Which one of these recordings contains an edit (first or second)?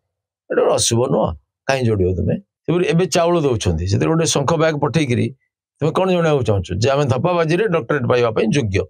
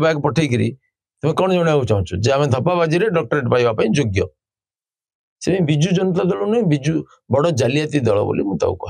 first